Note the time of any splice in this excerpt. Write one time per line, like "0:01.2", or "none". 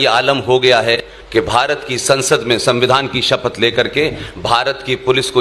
0:01.1